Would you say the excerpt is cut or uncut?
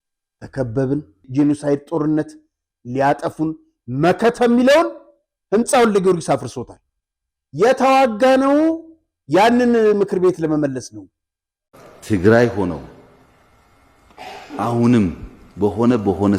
cut